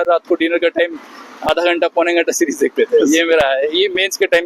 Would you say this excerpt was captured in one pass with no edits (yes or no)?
yes